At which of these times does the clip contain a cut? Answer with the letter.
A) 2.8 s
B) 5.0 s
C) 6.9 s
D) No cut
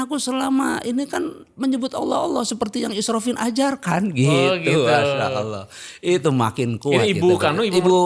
D